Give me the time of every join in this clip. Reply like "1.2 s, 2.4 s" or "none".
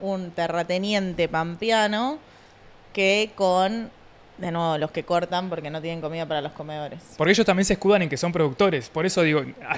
none